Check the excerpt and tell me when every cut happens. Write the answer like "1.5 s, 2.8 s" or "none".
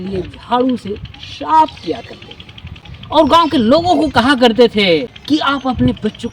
5.1 s